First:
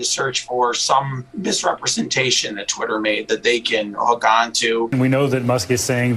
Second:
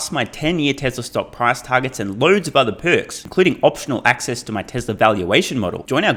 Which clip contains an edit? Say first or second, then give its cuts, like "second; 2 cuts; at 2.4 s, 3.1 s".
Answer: first; 2 cuts; at 1.2 s, 4.9 s